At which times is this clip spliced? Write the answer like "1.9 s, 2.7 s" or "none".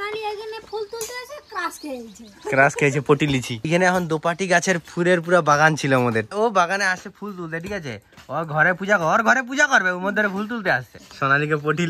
3.6 s, 6.3 s, 11.0 s